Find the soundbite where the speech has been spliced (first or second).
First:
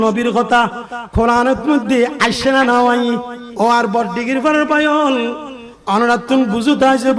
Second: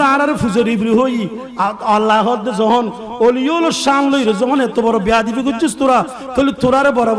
first